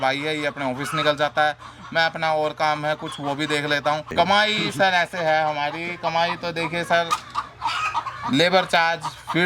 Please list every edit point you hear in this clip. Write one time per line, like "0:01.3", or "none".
0:04.1